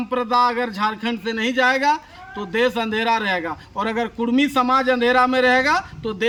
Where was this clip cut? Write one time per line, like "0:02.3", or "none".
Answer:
none